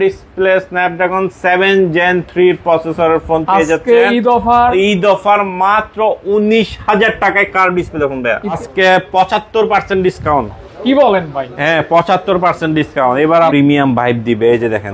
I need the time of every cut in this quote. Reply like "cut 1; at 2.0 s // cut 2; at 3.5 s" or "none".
cut 1; at 8.6 s // cut 2; at 13.5 s